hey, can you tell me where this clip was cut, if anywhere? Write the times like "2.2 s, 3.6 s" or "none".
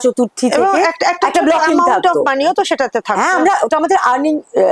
none